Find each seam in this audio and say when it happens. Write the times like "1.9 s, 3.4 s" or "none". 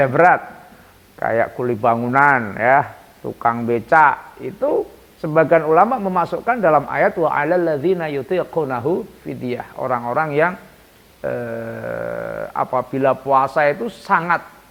none